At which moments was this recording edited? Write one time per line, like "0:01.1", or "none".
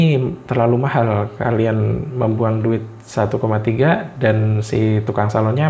none